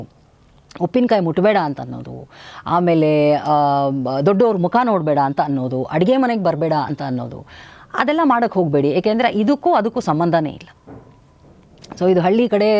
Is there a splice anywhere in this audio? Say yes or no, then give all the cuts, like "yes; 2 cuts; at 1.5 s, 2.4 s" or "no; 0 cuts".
no; 0 cuts